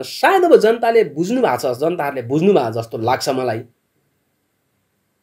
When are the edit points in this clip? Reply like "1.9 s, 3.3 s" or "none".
none